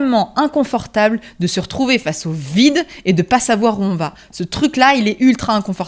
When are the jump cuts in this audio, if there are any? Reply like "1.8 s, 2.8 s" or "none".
none